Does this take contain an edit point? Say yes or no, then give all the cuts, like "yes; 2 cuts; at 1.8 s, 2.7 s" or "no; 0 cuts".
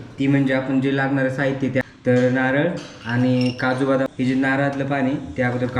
yes; 2 cuts; at 1.8 s, 4.1 s